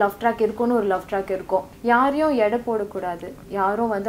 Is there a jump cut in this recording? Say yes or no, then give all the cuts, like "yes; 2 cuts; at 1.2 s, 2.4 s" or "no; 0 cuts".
yes; 1 cut; at 1.7 s